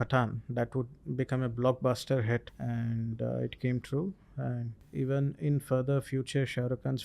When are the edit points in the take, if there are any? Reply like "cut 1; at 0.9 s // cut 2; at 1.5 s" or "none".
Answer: cut 1; at 2.5 s // cut 2; at 4.8 s